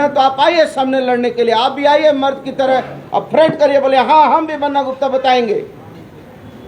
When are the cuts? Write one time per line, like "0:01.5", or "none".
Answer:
none